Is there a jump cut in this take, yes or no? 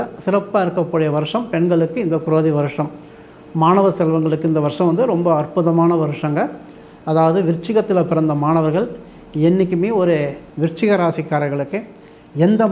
yes